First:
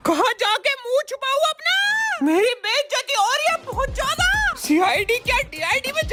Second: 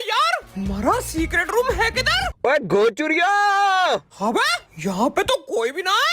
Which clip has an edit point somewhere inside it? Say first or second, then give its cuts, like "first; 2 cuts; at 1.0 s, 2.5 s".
second; 2 cuts; at 2.2 s, 4.1 s